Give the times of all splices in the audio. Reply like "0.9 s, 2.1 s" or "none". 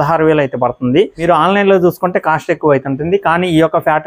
none

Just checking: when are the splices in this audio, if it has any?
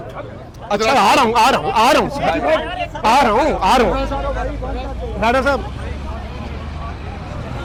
none

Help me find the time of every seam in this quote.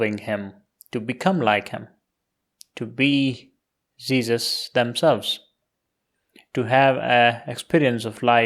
none

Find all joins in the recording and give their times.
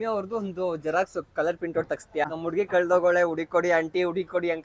2.2 s

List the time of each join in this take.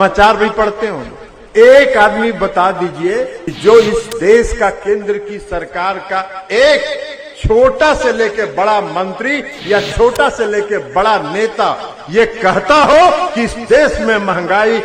3.4 s

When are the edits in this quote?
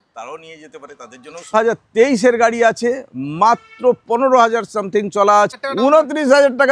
1.5 s, 5.5 s

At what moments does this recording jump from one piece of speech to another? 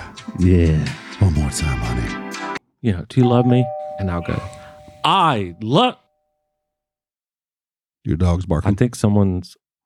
2.6 s

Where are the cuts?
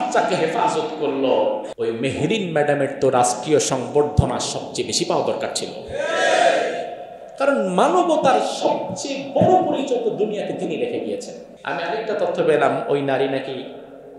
1.7 s, 11.5 s

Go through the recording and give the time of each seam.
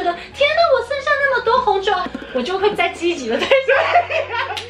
2.0 s

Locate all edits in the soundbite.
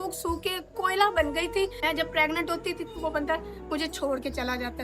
1.8 s

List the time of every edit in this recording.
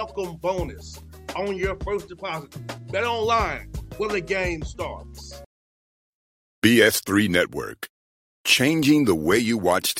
5.3 s

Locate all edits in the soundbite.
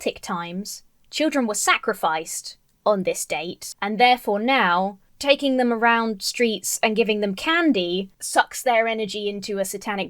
3.6 s

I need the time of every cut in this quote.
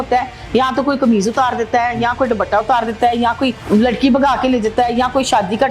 3.6 s

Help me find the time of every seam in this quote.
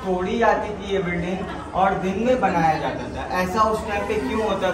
none

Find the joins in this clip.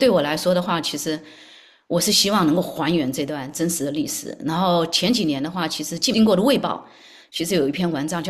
6.1 s

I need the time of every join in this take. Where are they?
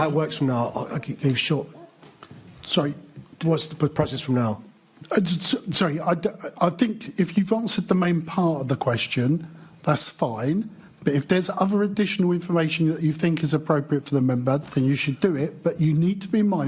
none

